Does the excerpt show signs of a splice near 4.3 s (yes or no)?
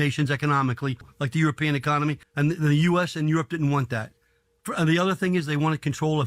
no